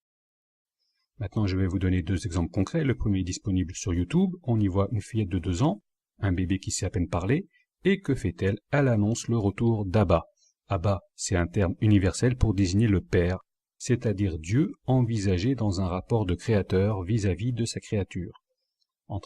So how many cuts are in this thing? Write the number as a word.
one